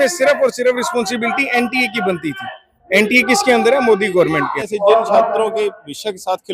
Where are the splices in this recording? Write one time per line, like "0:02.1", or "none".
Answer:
0:04.6